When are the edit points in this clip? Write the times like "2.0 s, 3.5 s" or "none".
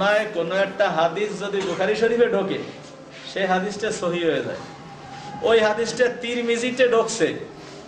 none